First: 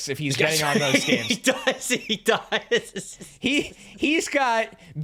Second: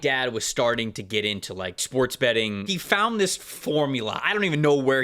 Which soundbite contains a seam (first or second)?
second